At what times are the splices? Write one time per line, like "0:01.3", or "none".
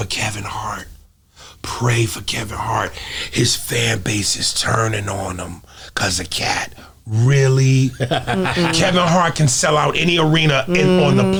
none